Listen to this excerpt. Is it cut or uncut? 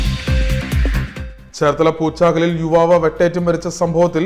uncut